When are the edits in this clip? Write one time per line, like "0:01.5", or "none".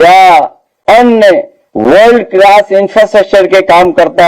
0:01.6

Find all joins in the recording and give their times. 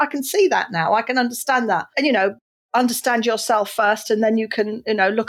0:01.9

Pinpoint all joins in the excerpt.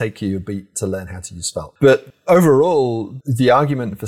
0:02.1
0:03.1

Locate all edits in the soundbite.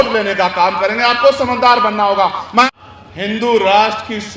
0:01.1
0:02.6

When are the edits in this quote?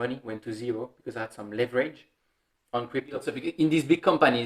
0:03.4

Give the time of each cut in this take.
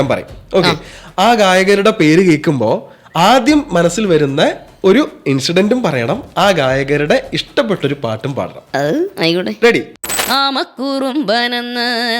0:09.9

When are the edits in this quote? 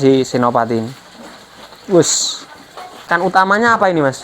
0:03.1

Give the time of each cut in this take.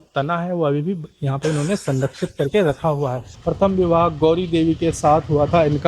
0:03.3

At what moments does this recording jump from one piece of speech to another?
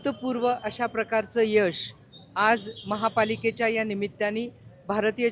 none

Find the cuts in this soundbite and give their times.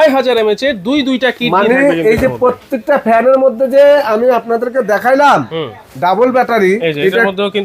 none

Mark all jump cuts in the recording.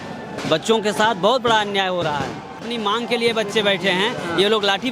0:02.6

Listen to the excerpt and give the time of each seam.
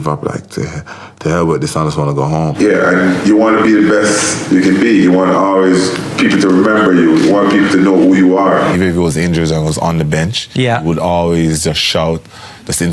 0:02.5
0:08.8

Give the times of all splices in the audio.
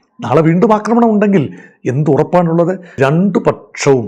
0:02.9

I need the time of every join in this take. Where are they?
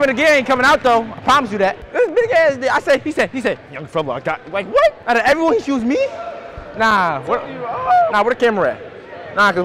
0:01.8
0:05.0

